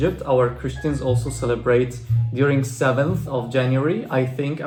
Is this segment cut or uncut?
uncut